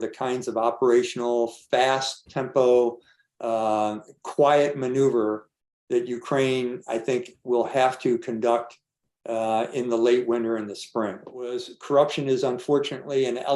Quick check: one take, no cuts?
no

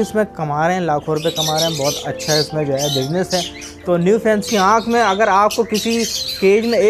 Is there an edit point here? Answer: yes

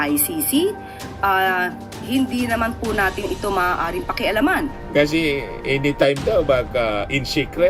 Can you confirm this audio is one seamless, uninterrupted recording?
no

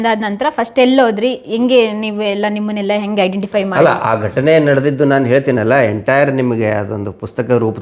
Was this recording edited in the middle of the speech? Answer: no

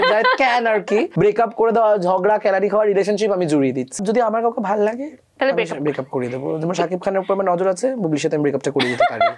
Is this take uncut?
no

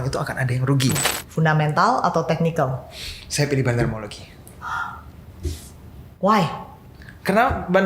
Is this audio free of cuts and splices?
no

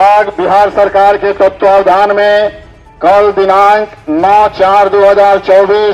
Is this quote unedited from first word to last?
yes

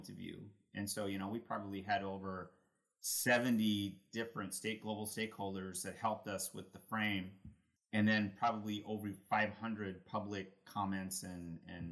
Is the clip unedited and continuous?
yes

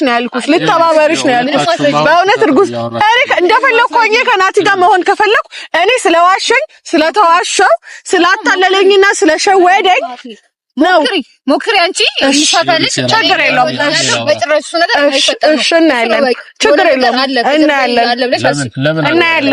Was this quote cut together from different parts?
no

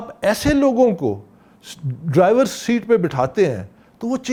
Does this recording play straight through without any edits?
yes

